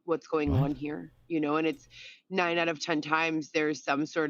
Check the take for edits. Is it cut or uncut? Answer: cut